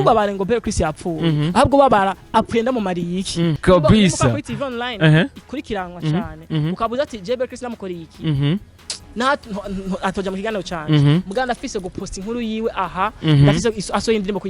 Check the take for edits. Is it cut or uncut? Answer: cut